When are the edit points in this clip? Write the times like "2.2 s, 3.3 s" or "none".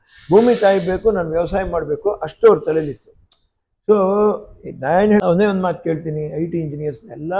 5.2 s